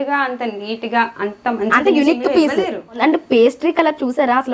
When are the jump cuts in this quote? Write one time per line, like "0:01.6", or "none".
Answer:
0:03.0